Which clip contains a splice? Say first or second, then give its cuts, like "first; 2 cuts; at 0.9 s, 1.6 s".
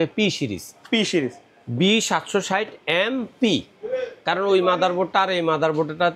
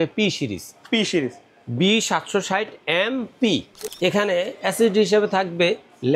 second; 1 cut; at 3.8 s